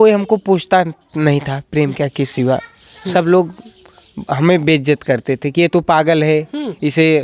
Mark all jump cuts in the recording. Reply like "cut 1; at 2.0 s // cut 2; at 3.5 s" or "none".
none